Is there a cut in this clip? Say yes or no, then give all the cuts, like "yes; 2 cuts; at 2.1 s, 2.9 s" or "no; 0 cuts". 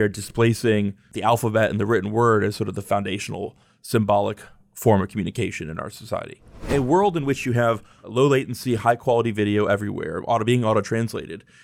yes; 3 cuts; at 1.1 s, 6.7 s, 8.1 s